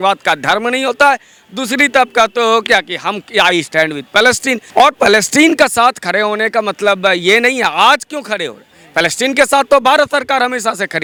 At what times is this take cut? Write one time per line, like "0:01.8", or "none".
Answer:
none

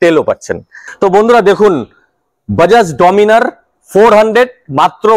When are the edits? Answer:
0:01.1

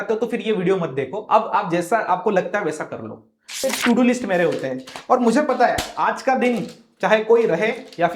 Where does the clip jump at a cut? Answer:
0:03.6

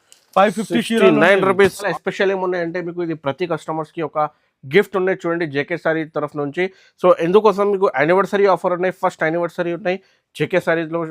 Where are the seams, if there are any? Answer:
0:01.9

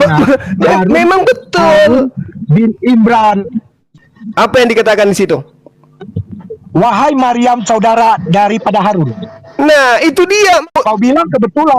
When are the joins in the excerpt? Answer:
0:03.8
0:10.7

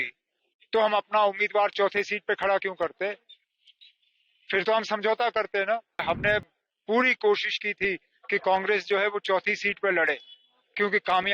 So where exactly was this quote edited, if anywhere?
0:06.0

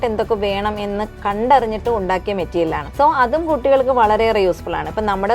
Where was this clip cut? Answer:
0:01.1
0:02.8

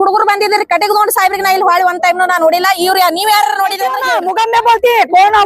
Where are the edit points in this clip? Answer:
0:04.1

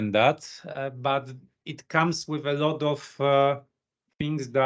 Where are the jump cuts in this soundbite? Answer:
none

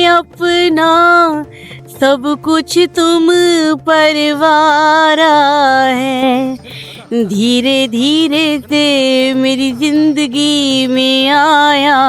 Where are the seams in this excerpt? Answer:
none

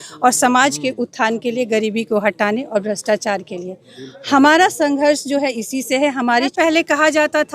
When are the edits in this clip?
0:06.5

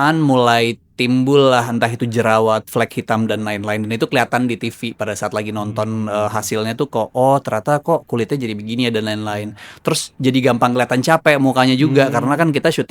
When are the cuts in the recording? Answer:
none

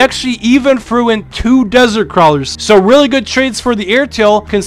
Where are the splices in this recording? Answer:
0:02.5

